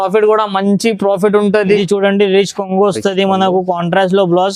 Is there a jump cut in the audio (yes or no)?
yes